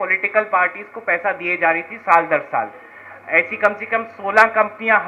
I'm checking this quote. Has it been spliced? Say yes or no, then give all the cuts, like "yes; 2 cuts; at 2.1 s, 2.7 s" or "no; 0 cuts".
no; 0 cuts